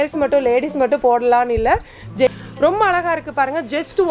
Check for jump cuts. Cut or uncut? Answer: cut